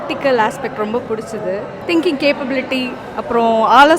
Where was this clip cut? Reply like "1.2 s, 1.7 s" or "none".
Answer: 1.8 s